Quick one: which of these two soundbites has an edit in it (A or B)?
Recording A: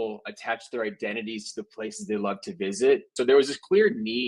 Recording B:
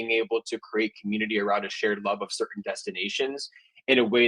A